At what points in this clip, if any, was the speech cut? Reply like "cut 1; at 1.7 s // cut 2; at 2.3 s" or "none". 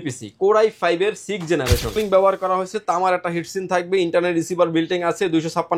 cut 1; at 1.9 s